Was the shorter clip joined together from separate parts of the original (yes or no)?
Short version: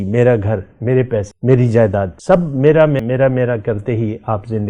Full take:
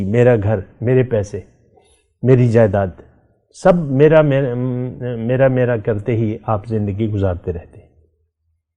yes